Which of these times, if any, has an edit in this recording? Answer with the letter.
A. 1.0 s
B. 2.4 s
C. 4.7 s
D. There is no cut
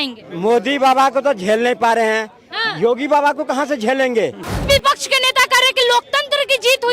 C